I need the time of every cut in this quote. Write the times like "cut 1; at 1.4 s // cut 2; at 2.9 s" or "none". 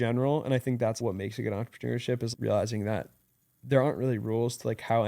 cut 1; at 1.0 s // cut 2; at 2.3 s